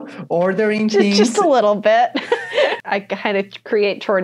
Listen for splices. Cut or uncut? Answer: cut